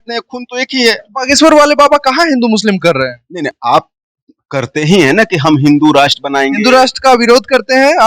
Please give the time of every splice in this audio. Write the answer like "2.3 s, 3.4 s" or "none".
none